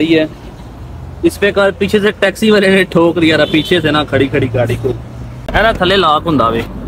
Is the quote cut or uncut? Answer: cut